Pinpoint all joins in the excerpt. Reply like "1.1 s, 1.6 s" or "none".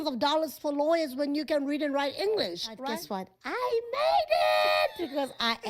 2.7 s